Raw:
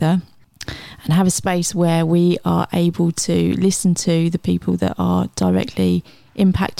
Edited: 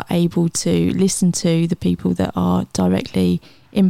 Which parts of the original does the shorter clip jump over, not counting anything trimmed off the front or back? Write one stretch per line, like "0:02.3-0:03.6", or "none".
none